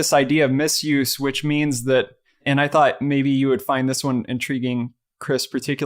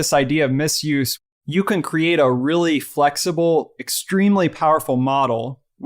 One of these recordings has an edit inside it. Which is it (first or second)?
second